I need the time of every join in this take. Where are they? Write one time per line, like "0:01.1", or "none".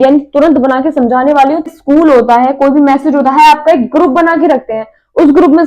0:01.7